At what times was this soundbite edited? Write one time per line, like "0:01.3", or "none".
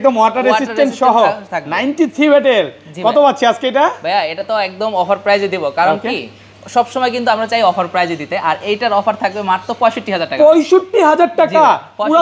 none